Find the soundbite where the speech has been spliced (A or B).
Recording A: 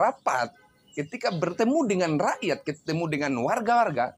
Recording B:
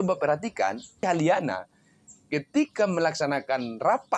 B